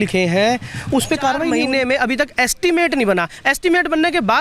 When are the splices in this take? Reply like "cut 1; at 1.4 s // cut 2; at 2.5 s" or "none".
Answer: cut 1; at 1.6 s

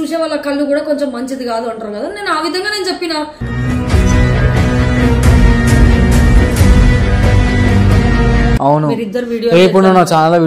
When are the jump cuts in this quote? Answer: cut 1; at 8.6 s

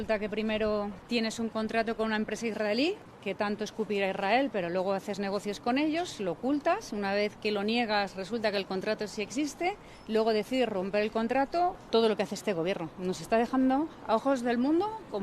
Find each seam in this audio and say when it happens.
cut 1; at 1.0 s // cut 2; at 3.1 s // cut 3; at 9.9 s // cut 4; at 11.8 s

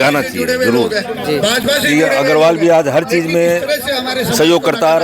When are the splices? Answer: none

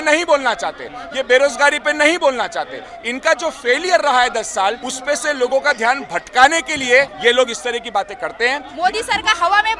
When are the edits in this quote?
cut 1; at 4.9 s // cut 2; at 7.1 s // cut 3; at 8.7 s

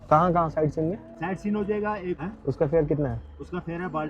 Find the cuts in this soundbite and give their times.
cut 1; at 1.1 s // cut 2; at 2.2 s

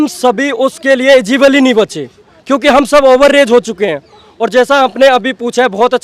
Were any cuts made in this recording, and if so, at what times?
none

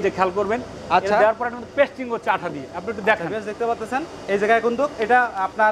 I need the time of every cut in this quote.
none

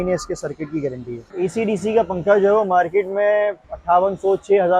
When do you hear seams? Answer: cut 1; at 1.3 s // cut 2; at 3.7 s

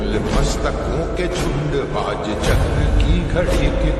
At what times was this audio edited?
none

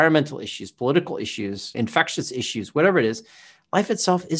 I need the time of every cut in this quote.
cut 1; at 1.7 s

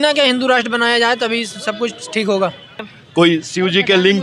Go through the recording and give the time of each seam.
cut 1; at 2.6 s

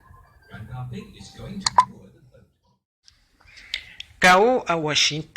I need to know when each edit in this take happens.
cut 1; at 2.7 s

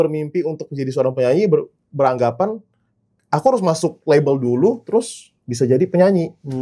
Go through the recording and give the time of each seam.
none

